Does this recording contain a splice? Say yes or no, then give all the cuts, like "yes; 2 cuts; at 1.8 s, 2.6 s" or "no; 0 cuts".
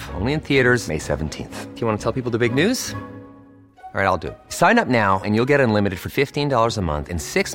no; 0 cuts